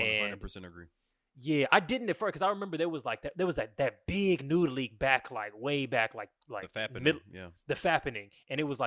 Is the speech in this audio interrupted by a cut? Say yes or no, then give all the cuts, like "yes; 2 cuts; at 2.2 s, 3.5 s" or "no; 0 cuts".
no; 0 cuts